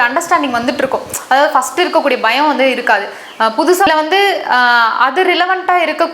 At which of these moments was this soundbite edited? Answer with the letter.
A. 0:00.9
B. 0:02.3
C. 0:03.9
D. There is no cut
C